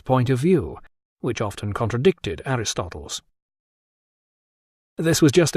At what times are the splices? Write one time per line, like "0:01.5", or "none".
0:02.6